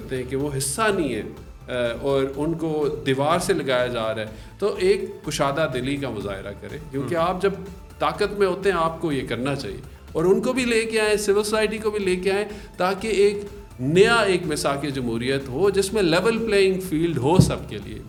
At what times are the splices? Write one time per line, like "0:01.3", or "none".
none